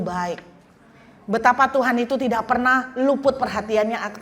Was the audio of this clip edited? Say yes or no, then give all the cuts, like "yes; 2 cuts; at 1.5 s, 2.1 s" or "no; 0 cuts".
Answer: no; 0 cuts